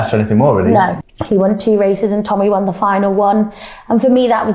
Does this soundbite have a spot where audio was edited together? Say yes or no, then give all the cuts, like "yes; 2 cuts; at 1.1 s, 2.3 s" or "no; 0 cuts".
yes; 1 cut; at 1.0 s